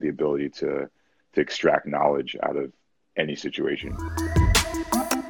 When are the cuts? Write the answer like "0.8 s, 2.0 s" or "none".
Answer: none